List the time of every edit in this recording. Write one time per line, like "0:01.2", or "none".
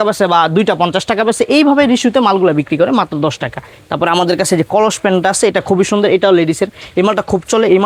none